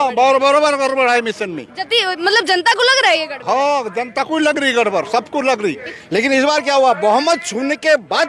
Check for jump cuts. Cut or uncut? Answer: cut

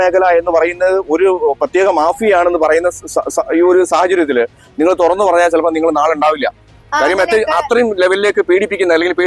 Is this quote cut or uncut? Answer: uncut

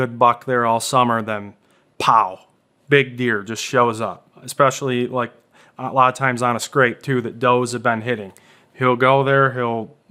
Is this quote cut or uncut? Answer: uncut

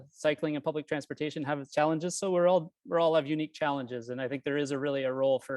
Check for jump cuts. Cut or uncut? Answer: uncut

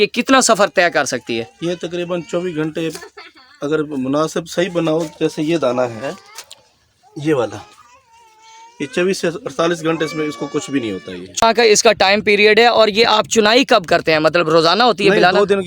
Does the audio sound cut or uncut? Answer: cut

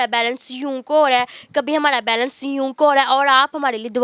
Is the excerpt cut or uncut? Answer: uncut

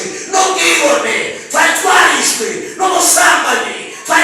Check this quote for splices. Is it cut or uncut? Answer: uncut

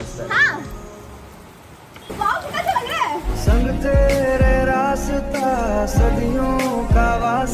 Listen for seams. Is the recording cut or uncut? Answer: uncut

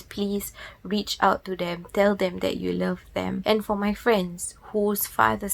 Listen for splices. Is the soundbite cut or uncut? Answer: cut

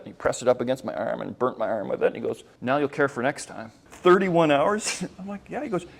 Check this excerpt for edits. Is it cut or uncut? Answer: cut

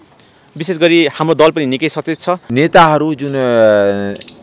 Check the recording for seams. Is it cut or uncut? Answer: cut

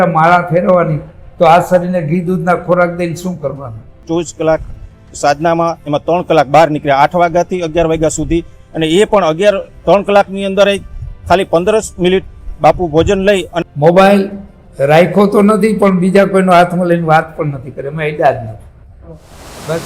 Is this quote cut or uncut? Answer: cut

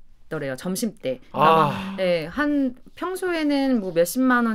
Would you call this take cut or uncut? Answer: uncut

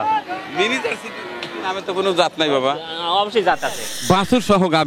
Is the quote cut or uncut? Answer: cut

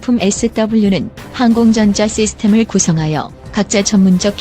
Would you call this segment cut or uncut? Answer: cut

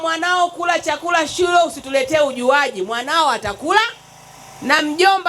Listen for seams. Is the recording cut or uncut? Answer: uncut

